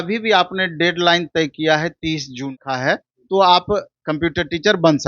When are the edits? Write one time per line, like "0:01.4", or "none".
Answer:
0:02.5